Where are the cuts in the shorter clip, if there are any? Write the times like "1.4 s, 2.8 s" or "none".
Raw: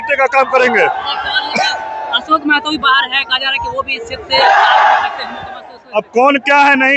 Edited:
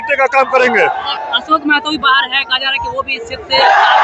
1.2 s